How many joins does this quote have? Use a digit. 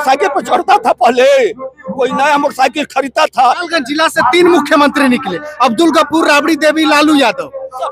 1